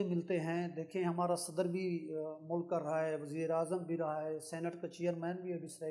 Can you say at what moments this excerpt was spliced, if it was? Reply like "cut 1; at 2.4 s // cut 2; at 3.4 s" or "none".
none